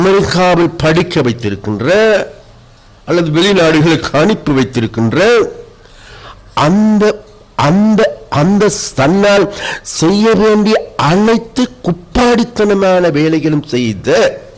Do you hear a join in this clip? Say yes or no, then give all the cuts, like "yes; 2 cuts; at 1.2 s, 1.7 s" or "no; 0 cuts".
no; 0 cuts